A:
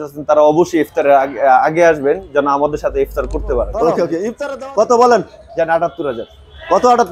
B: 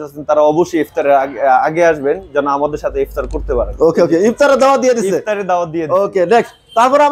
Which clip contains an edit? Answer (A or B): A